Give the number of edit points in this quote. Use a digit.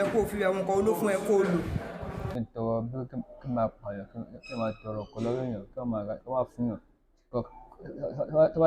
1